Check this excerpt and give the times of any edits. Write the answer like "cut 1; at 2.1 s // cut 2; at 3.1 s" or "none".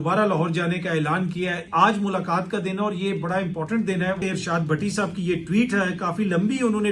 cut 1; at 1.6 s // cut 2; at 4.2 s